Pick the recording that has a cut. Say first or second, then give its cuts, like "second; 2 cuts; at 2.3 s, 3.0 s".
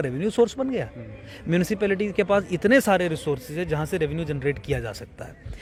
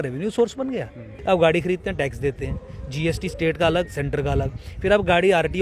second; 1 cut; at 1.1 s